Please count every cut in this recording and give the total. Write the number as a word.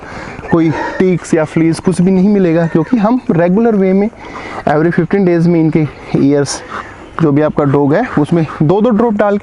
one